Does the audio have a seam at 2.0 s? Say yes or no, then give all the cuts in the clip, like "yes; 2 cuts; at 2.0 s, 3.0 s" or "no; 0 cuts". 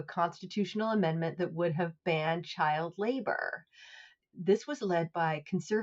no; 1 cut; at 4.2 s